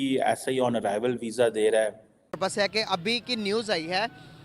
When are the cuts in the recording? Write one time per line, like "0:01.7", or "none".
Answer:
0:02.4